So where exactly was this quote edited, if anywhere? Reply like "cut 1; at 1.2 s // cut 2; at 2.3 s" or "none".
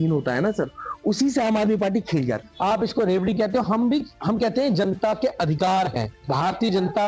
cut 1; at 2.4 s // cut 2; at 6.1 s